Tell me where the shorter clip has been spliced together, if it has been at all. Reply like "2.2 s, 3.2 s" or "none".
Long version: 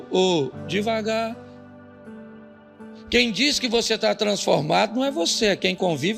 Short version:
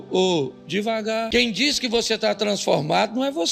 1.3 s